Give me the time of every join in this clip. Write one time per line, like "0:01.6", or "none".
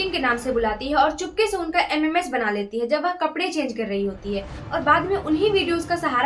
none